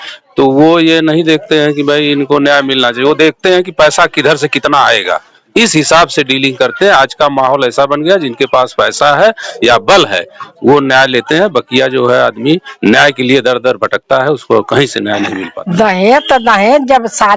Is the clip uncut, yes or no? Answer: no